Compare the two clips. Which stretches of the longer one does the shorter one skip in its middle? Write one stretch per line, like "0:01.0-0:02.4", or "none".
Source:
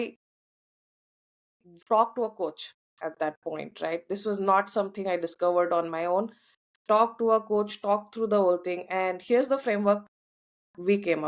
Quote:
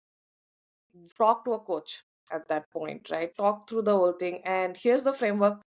0:04.0-0:07.7